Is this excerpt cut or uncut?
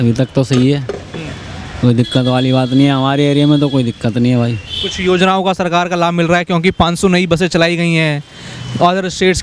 uncut